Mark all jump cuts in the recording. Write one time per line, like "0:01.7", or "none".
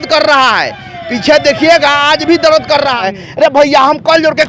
0:03.0

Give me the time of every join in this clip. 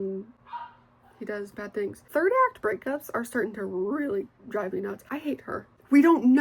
0:02.0
0:05.3

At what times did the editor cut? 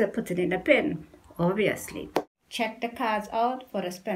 0:02.4

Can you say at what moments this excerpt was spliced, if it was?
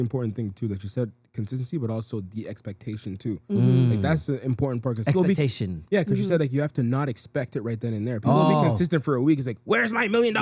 none

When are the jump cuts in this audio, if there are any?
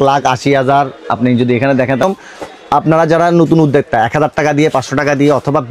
0:02.0

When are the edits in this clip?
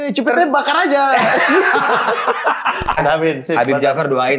0:03.0

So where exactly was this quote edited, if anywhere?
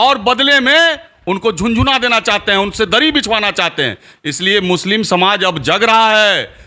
none

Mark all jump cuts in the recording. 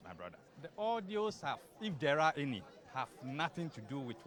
none

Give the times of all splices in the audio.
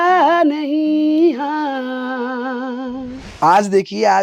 0:03.2

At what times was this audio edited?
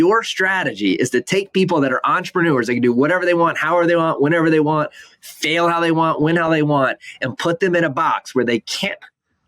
none

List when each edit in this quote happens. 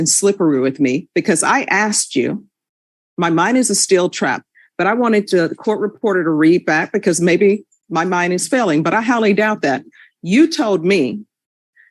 none

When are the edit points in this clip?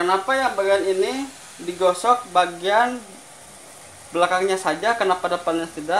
none

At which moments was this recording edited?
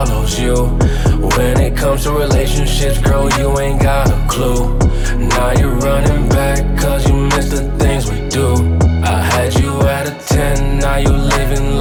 none

